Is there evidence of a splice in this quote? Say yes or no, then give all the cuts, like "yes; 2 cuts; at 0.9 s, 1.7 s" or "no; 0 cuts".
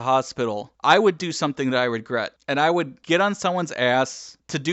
no; 0 cuts